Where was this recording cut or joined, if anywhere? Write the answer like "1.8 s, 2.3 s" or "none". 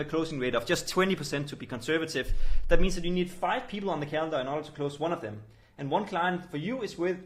none